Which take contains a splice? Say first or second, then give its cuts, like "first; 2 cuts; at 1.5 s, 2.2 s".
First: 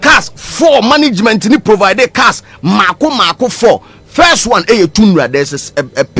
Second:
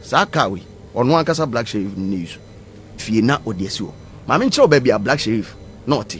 second; 1 cut; at 3.0 s